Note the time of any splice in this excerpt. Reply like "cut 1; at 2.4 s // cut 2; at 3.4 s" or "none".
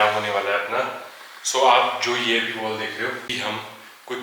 cut 1; at 3.3 s